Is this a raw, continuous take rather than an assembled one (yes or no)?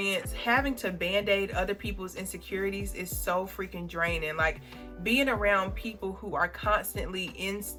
yes